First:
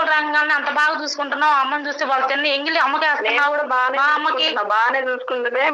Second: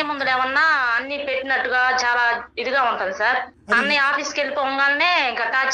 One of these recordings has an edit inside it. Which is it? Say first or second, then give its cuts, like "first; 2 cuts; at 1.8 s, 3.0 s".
second; 1 cut; at 3.8 s